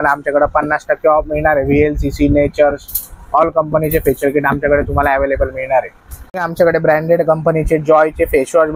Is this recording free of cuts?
yes; 0 cuts

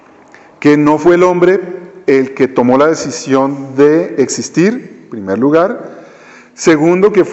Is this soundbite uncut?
no; 1 cut; at 2.5 s

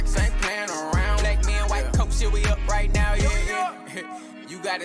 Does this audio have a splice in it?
no; 0 cuts

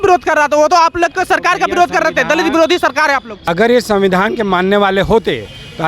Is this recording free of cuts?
no; 1 cut; at 3.4 s

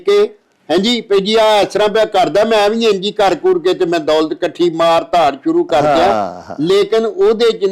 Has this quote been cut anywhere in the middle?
no; 0 cuts

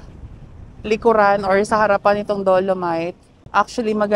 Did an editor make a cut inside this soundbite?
yes; 1 cut; at 3.2 s

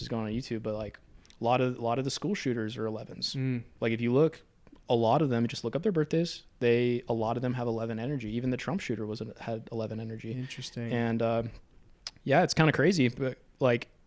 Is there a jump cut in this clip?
no; 0 cuts

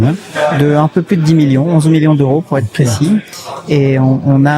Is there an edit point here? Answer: no; 0 cuts

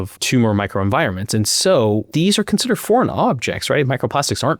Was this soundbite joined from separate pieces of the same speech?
yes; 1 cut; at 2.1 s

